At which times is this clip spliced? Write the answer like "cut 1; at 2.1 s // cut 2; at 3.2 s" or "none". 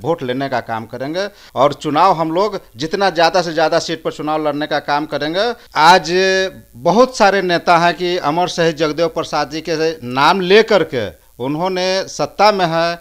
cut 1; at 1.4 s // cut 2; at 5.6 s